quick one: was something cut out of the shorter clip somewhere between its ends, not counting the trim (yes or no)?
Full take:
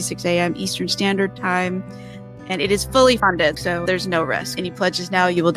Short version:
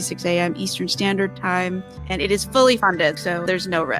yes